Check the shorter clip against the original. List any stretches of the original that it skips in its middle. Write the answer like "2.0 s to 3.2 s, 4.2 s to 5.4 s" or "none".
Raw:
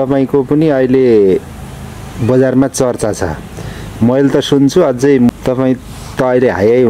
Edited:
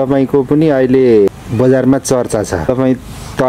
1.3 s to 2.0 s, 3.3 s to 5.4 s